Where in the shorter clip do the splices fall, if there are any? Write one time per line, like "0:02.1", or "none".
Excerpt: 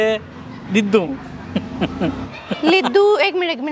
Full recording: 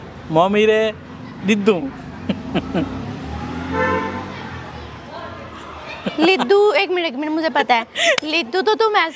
0:02.3